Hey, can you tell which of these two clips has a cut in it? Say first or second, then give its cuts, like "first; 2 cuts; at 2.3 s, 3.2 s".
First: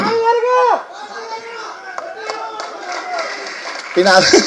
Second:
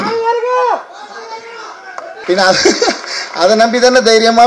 second; 1 cut; at 2.2 s